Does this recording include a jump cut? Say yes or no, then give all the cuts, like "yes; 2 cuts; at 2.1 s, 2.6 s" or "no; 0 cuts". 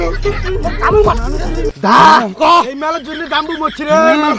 no; 0 cuts